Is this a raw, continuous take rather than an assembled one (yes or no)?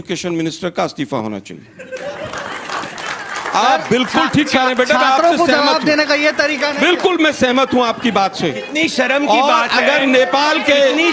yes